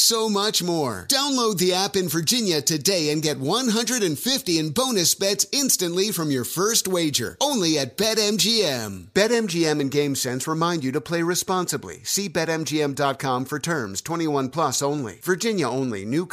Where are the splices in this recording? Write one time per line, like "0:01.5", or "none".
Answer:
none